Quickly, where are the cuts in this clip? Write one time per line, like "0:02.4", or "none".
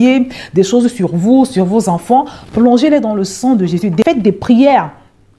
0:04.0